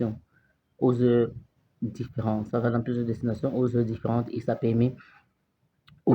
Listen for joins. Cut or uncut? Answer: uncut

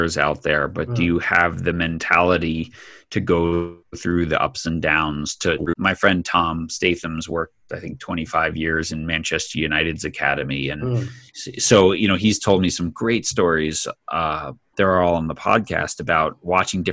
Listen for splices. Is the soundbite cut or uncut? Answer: uncut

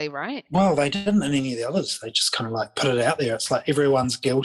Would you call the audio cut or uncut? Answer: uncut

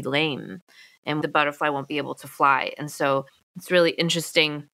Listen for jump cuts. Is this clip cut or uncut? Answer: uncut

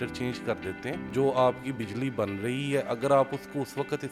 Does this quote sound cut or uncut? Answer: cut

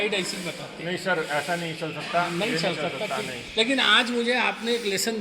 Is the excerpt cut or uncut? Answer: uncut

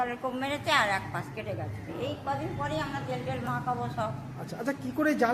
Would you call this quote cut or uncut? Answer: uncut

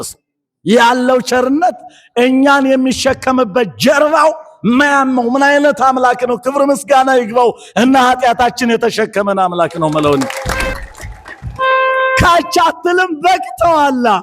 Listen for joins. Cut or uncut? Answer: cut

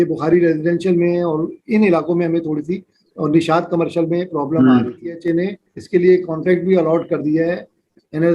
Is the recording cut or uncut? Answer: cut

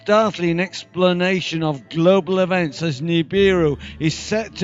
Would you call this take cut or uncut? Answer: cut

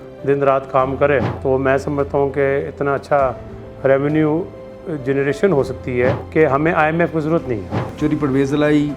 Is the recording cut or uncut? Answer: cut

